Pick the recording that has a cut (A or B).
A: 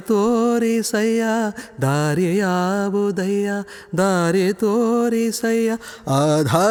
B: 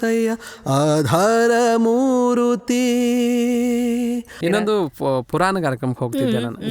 B